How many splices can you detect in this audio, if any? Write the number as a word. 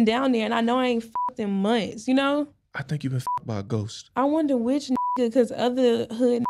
zero